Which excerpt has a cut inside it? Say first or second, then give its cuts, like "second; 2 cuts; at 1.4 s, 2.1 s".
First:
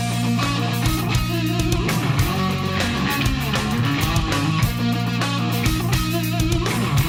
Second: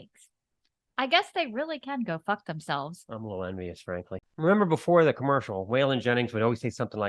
second; 1 cut; at 4.2 s